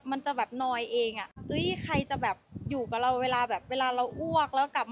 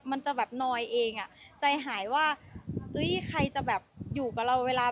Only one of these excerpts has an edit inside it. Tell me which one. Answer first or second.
first